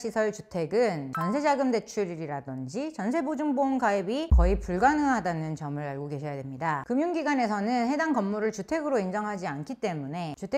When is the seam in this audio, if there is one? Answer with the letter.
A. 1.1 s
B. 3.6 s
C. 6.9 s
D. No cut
A